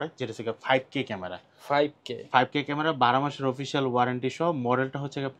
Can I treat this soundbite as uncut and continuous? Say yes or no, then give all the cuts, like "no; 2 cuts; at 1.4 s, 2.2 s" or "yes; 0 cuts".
yes; 0 cuts